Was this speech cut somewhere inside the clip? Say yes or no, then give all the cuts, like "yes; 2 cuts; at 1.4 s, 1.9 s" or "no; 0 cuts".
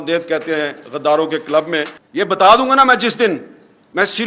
yes; 1 cut; at 2.0 s